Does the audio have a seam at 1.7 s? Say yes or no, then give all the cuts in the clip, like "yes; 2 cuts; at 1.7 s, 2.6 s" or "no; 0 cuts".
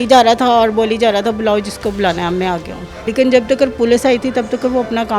no; 1 cut; at 3.0 s